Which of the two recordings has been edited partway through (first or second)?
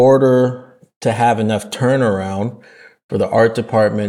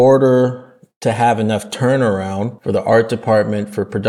second